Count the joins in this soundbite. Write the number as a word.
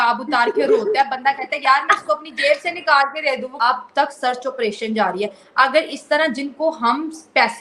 one